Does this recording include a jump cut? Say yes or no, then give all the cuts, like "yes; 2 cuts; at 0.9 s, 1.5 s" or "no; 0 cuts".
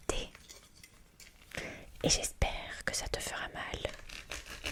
no; 0 cuts